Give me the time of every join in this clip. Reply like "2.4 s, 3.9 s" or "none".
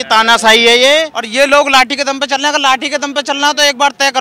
1.2 s

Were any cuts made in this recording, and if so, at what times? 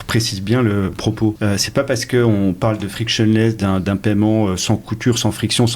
1.1 s

